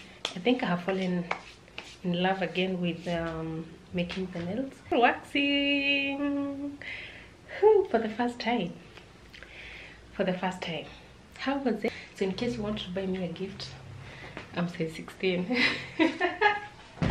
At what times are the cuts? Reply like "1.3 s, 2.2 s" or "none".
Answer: 4.9 s, 11.9 s